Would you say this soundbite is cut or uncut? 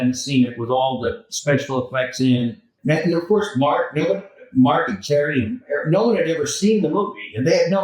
cut